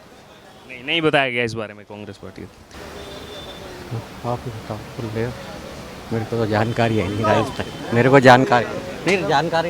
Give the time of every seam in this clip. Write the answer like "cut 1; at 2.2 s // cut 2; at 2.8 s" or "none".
cut 1; at 2.6 s